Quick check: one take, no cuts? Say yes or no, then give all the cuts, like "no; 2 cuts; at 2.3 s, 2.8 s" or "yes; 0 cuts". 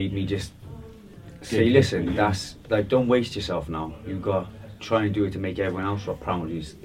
yes; 0 cuts